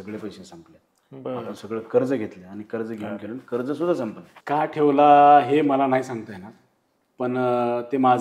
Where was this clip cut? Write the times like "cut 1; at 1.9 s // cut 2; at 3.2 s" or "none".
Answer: cut 1; at 4.3 s